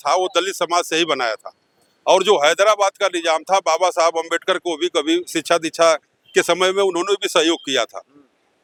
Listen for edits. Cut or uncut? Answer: uncut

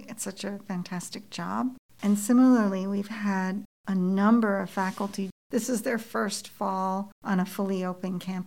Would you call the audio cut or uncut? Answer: cut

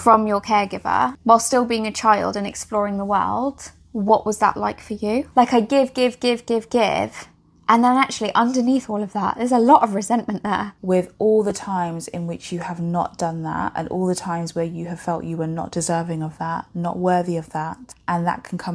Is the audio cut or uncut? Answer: cut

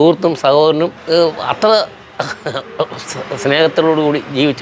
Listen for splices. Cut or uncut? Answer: cut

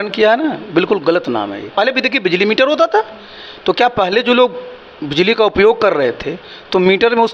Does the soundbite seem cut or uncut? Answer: cut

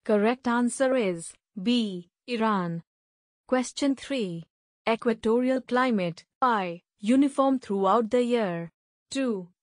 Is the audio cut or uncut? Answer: cut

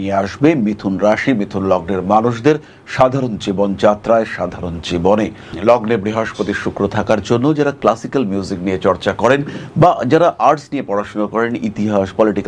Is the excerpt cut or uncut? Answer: cut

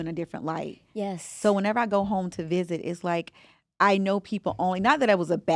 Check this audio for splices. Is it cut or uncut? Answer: uncut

